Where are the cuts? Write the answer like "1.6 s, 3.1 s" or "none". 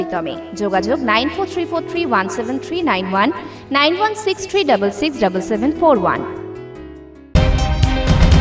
7.3 s